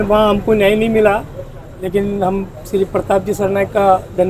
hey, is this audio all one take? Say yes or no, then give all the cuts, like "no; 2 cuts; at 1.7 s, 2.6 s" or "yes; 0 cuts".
yes; 0 cuts